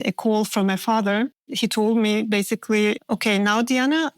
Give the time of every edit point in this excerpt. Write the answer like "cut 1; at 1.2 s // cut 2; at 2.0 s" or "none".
cut 1; at 1.5 s // cut 2; at 3.1 s